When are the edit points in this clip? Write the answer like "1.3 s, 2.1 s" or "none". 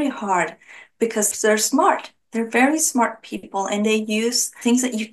1.3 s